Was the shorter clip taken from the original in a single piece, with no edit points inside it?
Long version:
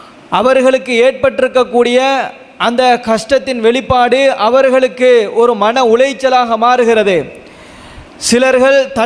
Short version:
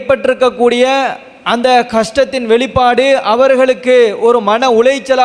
yes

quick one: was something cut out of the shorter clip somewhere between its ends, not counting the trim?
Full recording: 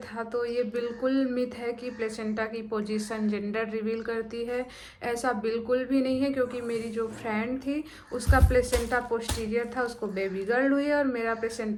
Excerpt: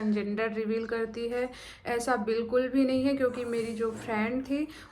no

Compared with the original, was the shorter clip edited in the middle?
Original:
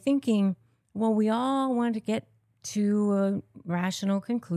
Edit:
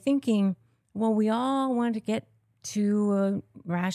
no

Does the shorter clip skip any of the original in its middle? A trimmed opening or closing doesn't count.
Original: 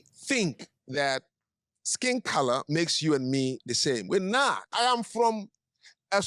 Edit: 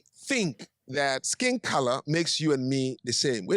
yes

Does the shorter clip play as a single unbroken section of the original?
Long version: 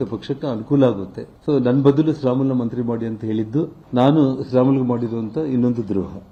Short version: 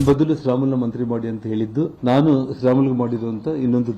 no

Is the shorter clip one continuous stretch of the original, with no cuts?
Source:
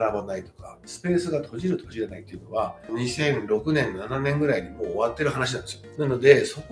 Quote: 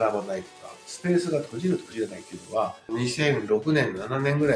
yes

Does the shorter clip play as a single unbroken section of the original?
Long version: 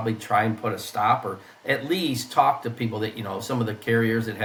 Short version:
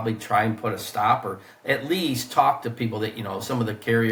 yes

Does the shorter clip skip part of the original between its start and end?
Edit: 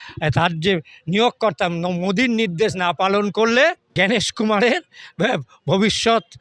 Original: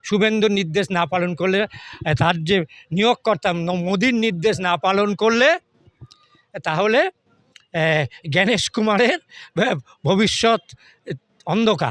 yes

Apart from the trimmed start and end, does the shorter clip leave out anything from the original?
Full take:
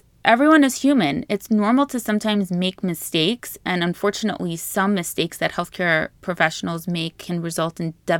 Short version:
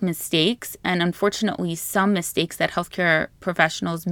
no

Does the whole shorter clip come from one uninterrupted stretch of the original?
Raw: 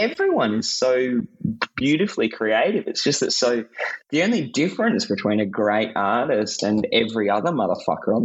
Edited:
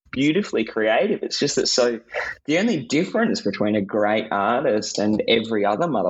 yes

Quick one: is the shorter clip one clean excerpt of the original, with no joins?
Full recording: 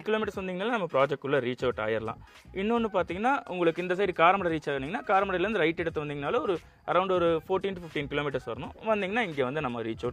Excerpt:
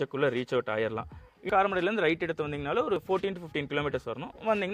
no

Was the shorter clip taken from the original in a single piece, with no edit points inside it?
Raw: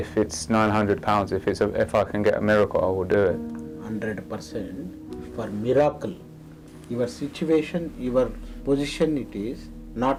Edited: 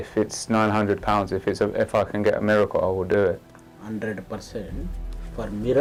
yes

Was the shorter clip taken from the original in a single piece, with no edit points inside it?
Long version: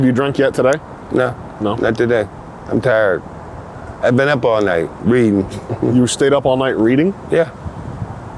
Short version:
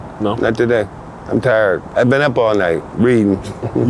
no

